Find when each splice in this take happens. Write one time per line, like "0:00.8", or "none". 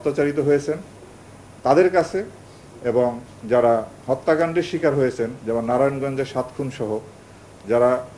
none